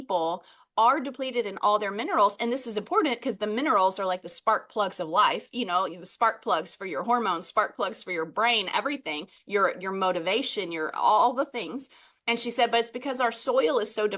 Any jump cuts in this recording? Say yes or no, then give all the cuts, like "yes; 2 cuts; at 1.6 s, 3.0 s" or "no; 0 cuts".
no; 0 cuts